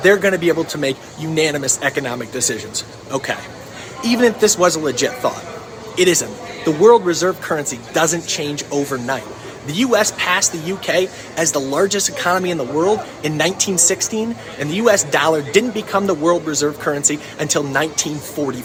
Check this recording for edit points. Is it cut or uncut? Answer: uncut